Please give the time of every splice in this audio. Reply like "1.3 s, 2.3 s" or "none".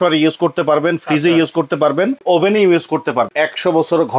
2.2 s, 3.3 s